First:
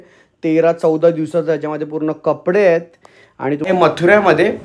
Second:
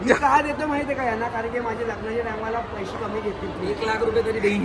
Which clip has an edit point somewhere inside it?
first; 1 cut; at 3.7 s

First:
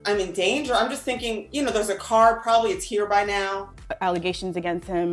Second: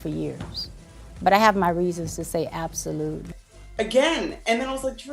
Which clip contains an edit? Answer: first; 1 cut; at 3.7 s

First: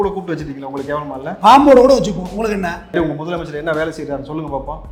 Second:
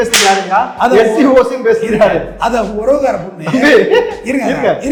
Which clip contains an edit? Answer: first; 1 cut; at 2.9 s

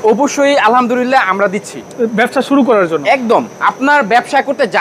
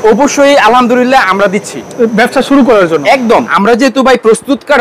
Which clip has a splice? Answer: second; 1 cut; at 3.5 s

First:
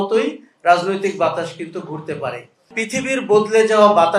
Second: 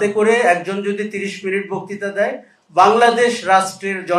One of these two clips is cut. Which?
first; 1 cut; at 2.7 s

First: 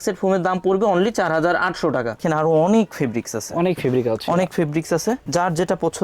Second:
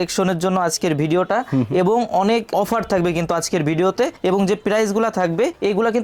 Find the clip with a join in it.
first; 1 cut; at 2.2 s

